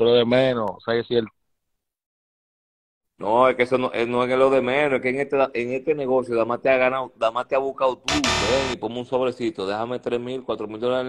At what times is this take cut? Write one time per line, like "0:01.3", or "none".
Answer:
0:08.3